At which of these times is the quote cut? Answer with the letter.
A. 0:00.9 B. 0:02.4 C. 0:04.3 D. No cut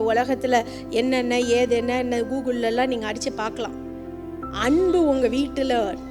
C